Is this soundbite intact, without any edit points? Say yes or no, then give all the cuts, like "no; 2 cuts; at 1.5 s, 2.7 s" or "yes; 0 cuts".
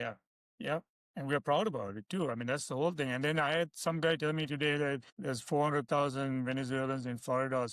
no; 2 cuts; at 1.0 s, 5.1 s